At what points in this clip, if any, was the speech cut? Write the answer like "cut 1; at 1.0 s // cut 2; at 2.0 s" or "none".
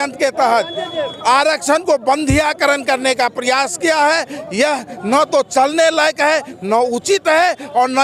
none